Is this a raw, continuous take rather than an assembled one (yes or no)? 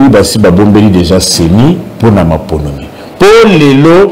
yes